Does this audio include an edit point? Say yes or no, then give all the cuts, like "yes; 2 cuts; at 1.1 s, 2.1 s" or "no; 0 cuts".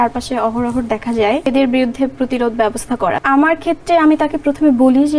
yes; 2 cuts; at 1.5 s, 3.2 s